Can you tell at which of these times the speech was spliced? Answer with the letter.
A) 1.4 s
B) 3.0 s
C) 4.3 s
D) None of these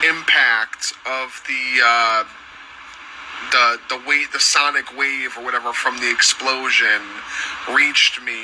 D